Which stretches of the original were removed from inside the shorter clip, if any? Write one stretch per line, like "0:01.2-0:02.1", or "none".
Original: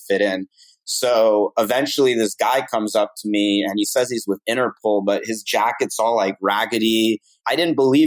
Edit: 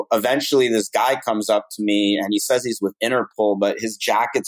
none